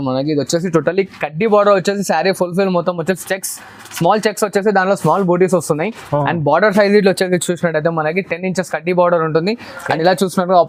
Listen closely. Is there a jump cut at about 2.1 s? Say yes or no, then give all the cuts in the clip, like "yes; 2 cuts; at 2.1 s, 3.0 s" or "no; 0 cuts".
no; 0 cuts